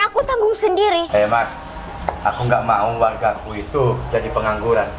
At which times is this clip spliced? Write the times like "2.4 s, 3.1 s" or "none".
1.1 s